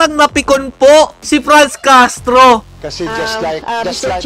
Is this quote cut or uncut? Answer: cut